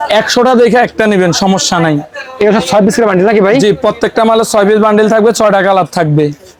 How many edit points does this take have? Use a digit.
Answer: 0